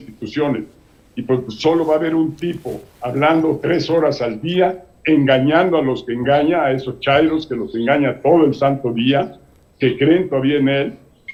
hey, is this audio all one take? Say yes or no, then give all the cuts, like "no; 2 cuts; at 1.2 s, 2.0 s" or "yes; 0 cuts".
yes; 0 cuts